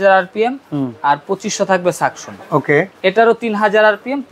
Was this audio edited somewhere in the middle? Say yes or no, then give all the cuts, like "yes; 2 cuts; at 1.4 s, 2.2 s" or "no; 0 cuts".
no; 0 cuts